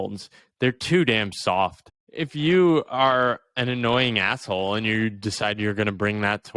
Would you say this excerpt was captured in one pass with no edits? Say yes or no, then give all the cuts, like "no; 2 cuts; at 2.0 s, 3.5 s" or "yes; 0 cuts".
no; 1 cut; at 2.1 s